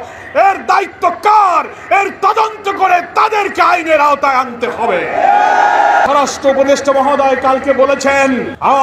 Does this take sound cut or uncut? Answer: cut